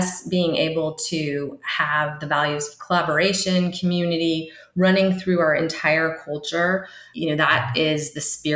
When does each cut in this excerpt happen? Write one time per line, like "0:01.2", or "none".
none